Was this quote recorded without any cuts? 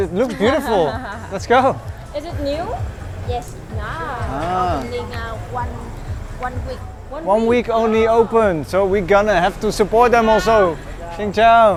yes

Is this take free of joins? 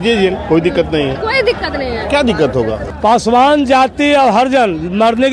no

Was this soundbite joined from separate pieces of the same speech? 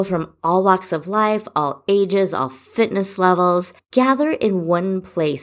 yes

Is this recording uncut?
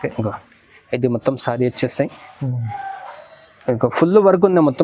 yes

